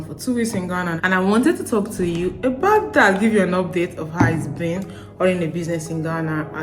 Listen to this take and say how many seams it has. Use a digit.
1